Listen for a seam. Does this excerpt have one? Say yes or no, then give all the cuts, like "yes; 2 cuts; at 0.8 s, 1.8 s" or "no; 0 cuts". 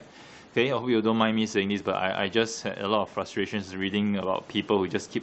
no; 0 cuts